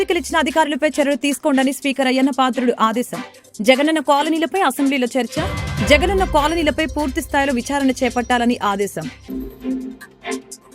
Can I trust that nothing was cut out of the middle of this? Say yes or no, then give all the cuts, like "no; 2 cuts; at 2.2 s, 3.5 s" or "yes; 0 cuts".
no; 1 cut; at 9.1 s